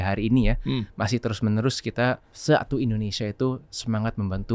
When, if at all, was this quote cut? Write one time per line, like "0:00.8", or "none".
0:02.3